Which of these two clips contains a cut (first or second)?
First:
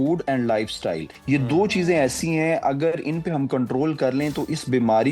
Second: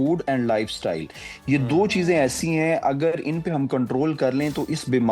first